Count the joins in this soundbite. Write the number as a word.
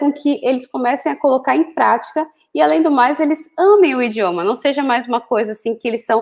zero